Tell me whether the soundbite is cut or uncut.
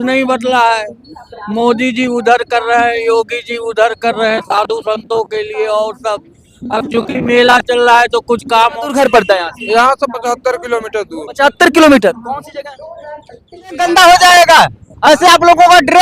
cut